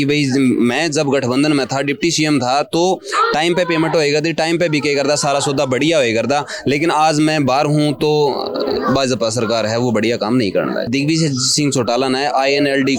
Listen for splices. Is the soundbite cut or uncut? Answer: cut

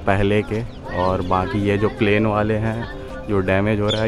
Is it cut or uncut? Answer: uncut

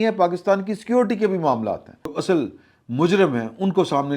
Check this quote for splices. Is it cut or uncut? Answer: cut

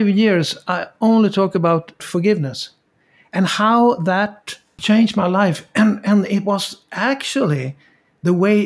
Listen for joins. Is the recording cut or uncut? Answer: cut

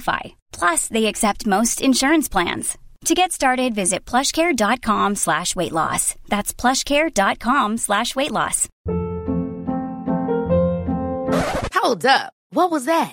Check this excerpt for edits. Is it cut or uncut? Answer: cut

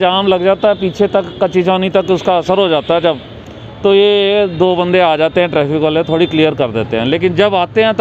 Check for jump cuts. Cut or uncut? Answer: uncut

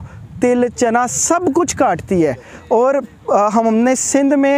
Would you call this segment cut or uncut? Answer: uncut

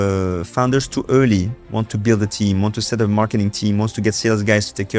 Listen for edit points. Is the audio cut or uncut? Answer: uncut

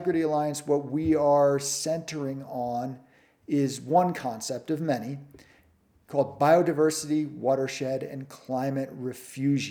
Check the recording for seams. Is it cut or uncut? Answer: uncut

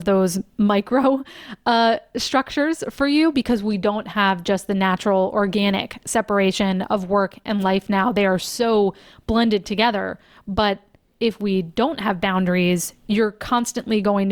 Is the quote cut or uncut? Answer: uncut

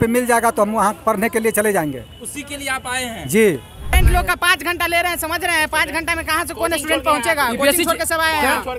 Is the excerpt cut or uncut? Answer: cut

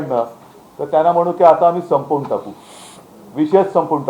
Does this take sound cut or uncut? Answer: uncut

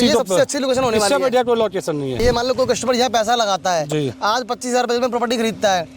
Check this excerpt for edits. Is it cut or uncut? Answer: cut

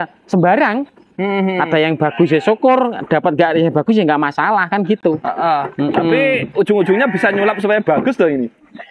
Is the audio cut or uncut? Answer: uncut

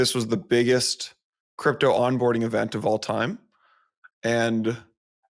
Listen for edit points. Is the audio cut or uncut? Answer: uncut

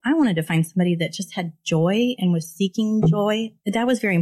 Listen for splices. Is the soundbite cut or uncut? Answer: uncut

